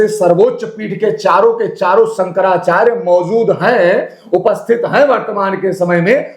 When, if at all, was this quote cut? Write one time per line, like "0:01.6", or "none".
none

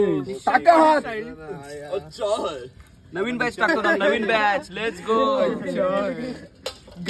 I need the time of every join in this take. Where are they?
none

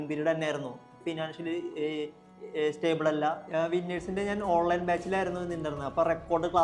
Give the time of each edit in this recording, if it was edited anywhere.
0:00.9
0:03.4

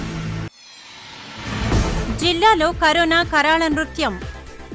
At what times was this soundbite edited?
0:02.1

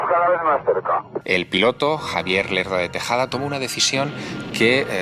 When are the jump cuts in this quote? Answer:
0:01.1

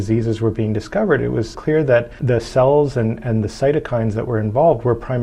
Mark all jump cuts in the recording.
0:01.7

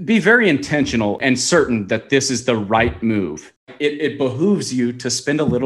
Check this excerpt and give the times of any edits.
0:01.2
0:03.6

